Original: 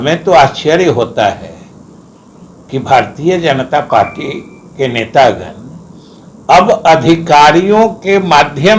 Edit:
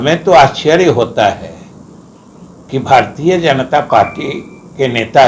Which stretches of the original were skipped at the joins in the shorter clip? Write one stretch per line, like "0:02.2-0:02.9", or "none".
none